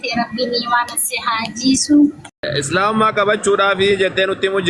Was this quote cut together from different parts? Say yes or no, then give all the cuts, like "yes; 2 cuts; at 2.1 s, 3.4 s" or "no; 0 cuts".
yes; 1 cut; at 2.5 s